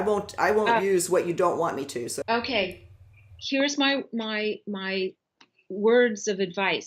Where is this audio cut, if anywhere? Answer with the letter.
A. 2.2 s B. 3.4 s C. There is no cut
A